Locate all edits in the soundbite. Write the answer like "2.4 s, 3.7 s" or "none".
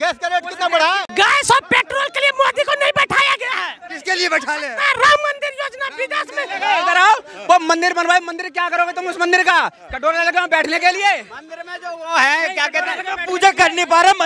1.1 s, 6.5 s